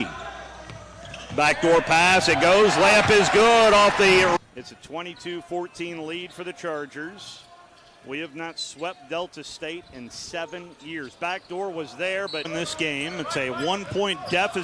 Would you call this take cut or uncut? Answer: uncut